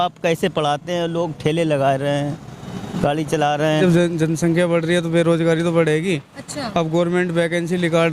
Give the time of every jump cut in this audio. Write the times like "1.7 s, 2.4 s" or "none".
3.8 s

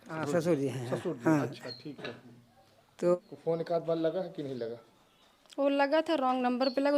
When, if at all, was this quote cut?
3.1 s

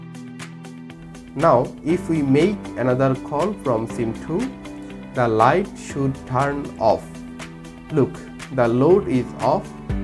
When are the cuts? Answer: 1.3 s

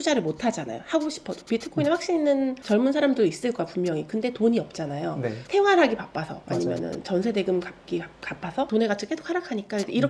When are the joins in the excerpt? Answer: 8.7 s

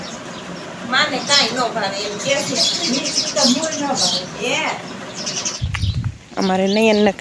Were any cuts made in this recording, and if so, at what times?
5.5 s

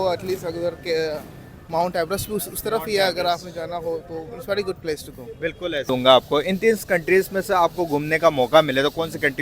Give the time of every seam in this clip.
5.9 s

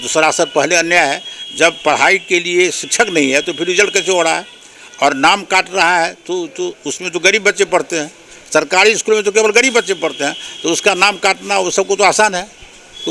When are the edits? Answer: none

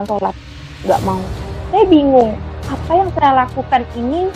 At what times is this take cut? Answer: none

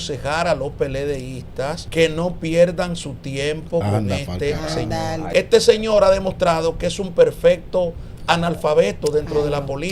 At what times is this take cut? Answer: 1.8 s, 5.2 s

